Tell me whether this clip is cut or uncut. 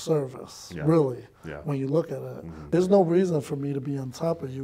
cut